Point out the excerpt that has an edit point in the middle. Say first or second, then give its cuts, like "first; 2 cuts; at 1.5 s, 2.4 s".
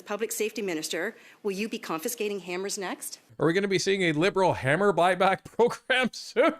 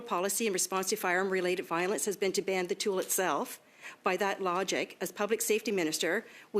first; 1 cut; at 3.2 s